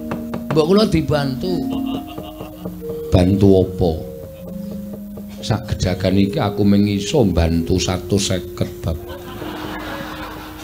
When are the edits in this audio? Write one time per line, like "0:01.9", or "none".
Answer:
none